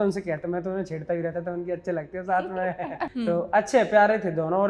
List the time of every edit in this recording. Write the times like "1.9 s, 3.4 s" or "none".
3.1 s